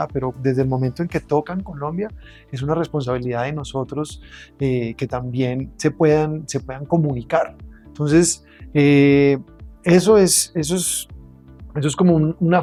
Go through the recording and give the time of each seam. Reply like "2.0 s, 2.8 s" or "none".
none